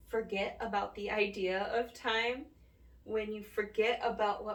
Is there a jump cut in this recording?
no; 0 cuts

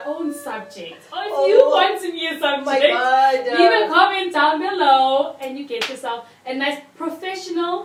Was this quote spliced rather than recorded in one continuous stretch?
no; 0 cuts

